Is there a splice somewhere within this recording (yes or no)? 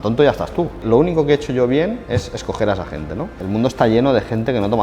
yes